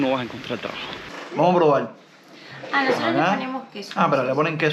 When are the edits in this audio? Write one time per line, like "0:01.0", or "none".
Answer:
0:01.1